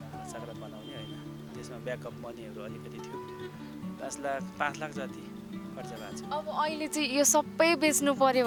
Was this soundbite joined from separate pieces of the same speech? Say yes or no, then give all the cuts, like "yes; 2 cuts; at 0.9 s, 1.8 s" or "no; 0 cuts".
no; 0 cuts